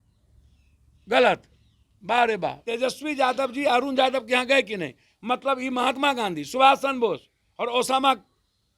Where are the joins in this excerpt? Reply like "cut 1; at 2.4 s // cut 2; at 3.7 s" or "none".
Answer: cut 1; at 2.6 s